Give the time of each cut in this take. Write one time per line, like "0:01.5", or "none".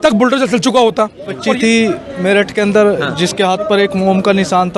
0:01.5